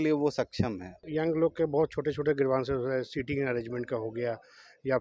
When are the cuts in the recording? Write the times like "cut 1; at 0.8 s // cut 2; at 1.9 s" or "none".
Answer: cut 1; at 1.0 s